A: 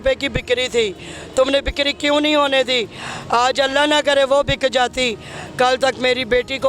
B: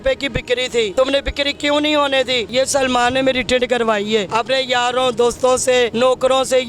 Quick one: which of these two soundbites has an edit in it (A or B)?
B